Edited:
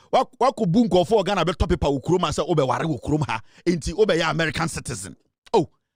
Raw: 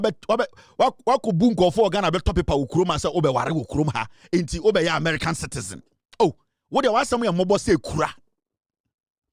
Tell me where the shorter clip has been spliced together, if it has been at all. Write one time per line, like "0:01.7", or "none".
none